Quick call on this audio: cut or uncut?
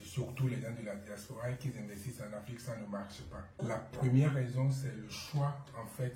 cut